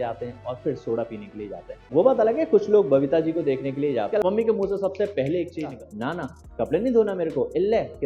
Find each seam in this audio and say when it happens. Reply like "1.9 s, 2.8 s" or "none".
1.8 s, 4.2 s, 5.7 s